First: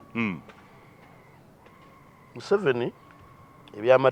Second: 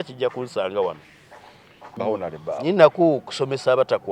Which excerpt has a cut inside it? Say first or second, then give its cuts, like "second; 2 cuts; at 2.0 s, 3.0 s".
second; 1 cut; at 1.8 s